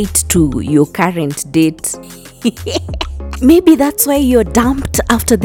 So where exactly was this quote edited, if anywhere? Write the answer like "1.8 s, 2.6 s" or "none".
none